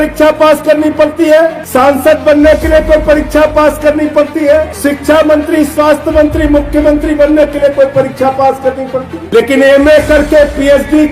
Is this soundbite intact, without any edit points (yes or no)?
no